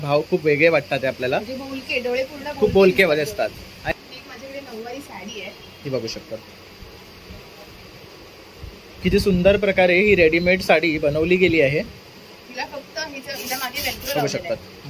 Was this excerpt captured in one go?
no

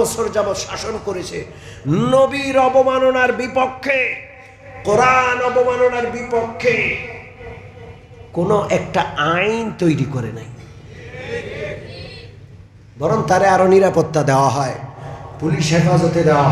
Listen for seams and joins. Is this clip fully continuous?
yes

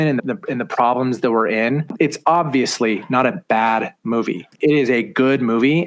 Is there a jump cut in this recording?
yes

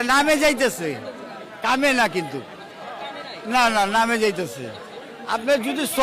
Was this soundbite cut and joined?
no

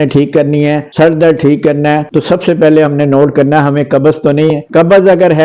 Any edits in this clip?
no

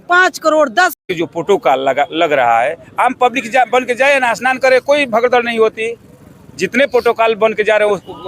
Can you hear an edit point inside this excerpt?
yes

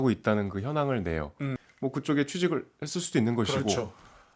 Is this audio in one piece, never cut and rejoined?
no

